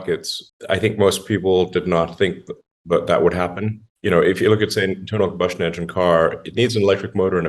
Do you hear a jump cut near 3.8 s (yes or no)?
yes